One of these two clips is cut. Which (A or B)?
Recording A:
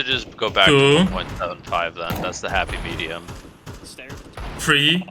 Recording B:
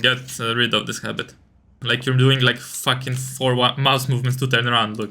B